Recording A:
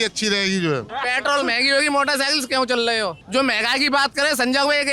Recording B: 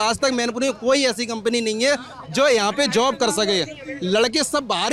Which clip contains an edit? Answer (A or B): A